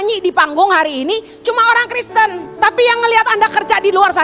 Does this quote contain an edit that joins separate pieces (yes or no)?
yes